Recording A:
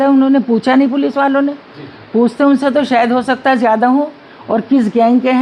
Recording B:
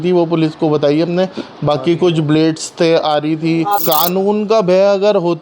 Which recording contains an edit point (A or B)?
B